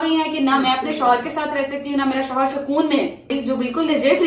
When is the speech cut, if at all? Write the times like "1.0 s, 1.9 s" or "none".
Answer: 3.3 s